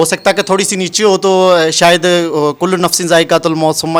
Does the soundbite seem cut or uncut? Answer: uncut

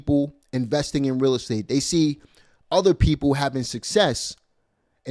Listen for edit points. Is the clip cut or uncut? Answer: uncut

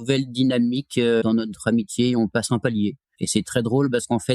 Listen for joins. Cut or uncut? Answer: cut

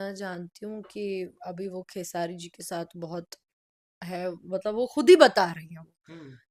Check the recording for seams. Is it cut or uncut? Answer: uncut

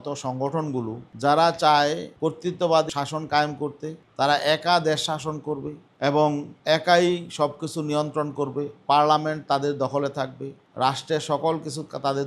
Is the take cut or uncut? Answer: cut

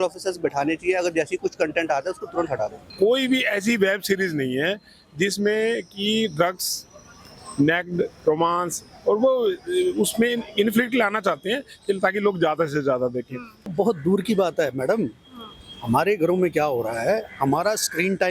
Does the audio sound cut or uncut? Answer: cut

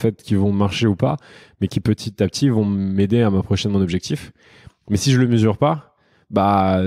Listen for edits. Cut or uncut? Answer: uncut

